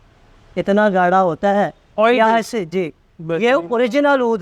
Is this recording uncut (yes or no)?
yes